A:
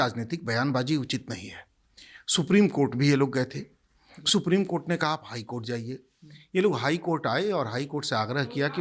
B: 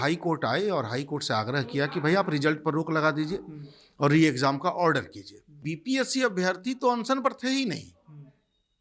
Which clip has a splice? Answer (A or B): B